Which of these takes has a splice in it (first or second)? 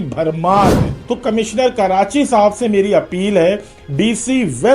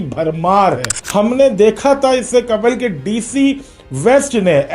first